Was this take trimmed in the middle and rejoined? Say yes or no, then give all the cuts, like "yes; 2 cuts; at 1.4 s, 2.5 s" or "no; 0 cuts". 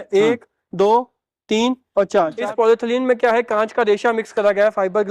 yes; 1 cut; at 2.4 s